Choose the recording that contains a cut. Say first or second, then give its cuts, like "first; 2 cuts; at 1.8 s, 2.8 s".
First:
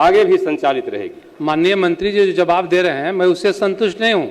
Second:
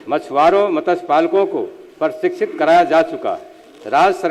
first; 1 cut; at 1.3 s